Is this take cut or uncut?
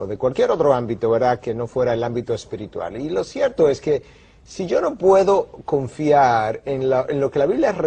cut